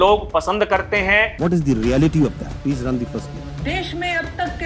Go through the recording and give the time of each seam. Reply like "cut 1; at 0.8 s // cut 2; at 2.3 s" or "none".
cut 1; at 1.3 s // cut 2; at 2.5 s // cut 3; at 3.4 s